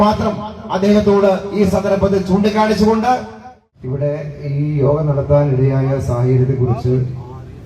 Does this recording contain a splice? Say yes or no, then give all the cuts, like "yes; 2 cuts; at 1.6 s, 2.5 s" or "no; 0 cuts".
yes; 1 cut; at 4.1 s